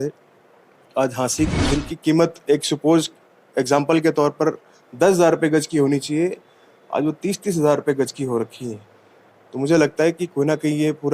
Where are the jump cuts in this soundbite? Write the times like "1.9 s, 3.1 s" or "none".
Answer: 1.5 s